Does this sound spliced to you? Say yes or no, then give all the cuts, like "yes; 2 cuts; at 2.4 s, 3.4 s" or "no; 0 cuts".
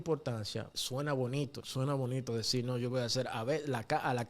yes; 1 cut; at 1.6 s